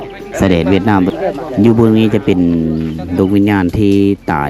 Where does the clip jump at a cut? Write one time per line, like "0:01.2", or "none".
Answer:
0:01.1